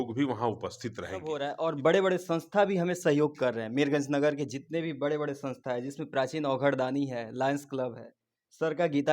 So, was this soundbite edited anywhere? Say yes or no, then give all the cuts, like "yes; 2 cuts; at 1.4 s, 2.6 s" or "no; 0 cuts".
yes; 1 cut; at 1.3 s